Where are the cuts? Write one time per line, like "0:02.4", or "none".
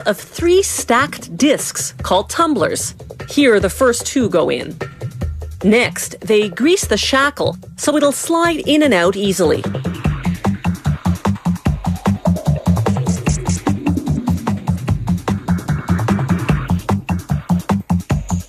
none